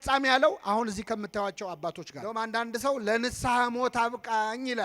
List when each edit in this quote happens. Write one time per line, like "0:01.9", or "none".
0:02.1

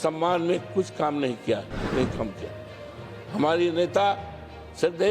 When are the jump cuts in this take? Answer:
0:01.9

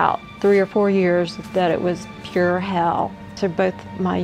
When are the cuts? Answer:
0:03.2

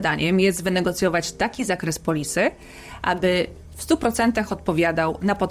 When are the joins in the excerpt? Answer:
none

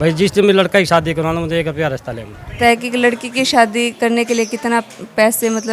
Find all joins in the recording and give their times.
0:02.6
0:04.1

